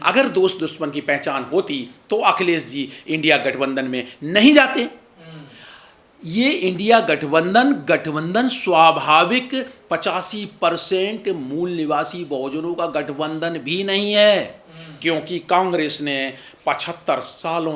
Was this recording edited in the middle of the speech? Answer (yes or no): no